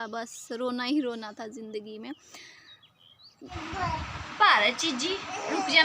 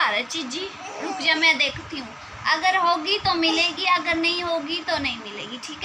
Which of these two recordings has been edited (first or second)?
first